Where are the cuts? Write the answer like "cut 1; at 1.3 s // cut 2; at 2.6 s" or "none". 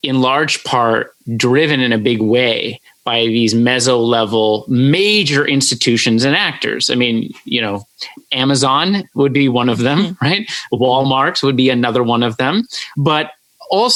none